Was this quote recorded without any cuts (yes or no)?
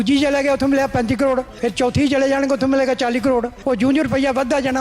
no